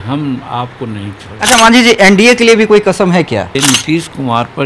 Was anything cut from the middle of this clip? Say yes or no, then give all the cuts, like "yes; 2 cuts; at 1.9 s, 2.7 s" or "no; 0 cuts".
yes; 1 cut; at 3.5 s